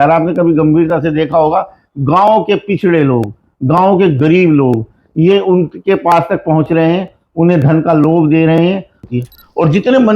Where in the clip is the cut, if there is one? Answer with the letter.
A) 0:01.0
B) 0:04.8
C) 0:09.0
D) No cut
C